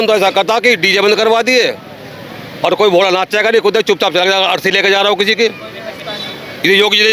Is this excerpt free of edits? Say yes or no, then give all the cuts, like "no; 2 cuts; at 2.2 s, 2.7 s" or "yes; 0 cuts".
yes; 0 cuts